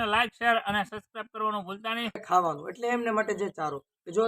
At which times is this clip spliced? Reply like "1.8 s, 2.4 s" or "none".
2.2 s